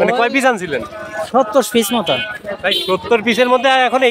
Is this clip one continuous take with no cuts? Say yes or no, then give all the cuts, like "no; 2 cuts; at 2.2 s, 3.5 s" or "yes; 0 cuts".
yes; 0 cuts